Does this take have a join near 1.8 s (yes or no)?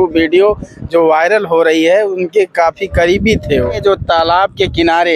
no